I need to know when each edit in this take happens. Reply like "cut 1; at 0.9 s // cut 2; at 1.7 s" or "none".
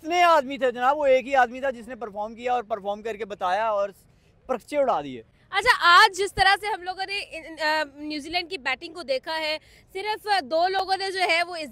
none